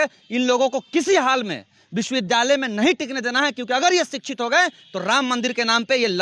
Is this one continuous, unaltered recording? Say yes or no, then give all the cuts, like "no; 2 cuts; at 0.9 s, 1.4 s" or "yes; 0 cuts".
yes; 0 cuts